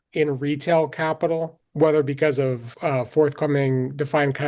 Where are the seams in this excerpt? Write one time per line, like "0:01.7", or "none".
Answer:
0:01.6
0:02.7